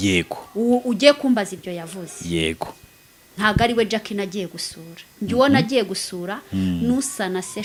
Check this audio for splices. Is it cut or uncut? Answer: uncut